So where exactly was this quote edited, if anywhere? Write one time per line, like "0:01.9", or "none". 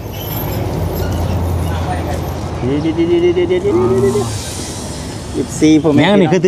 none